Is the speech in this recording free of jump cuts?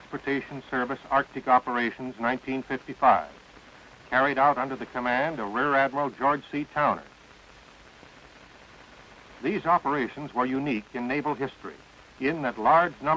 yes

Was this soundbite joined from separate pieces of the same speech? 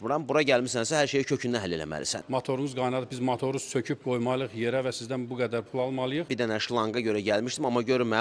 yes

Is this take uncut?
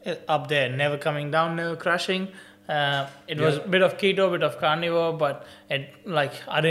yes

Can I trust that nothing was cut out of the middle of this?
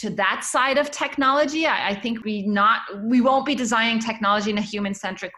no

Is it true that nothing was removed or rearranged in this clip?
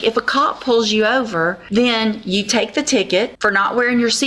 no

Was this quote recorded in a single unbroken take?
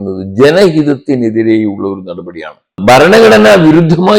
no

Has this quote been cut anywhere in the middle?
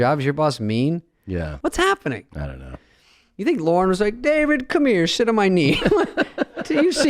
yes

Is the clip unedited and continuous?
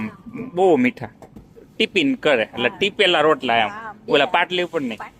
no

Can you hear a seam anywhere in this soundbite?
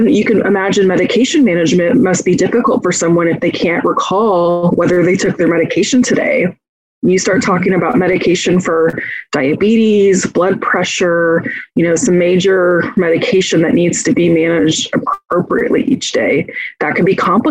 no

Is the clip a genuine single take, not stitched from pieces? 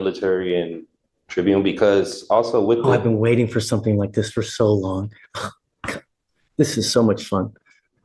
yes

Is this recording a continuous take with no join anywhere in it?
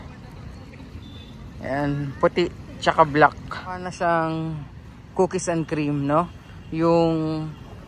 no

